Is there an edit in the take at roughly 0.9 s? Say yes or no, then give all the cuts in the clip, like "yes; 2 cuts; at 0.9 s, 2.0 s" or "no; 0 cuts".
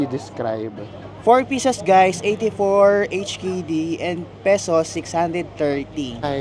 yes; 1 cut; at 0.9 s